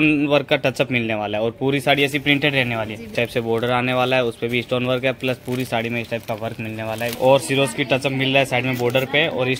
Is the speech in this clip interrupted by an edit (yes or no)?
yes